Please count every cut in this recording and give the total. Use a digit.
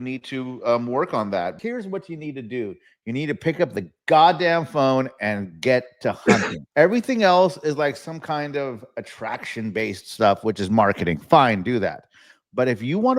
2